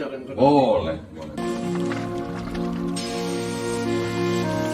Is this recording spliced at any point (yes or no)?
no